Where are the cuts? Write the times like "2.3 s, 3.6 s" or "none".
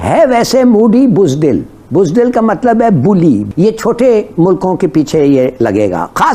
none